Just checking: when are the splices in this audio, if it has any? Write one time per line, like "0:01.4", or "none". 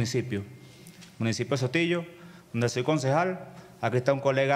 none